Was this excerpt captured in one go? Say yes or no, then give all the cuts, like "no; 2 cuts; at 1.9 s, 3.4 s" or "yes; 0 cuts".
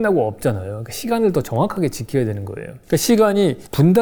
yes; 0 cuts